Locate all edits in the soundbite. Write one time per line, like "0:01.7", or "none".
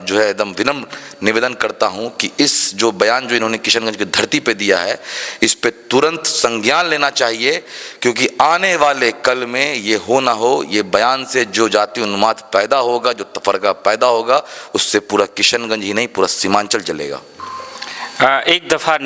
none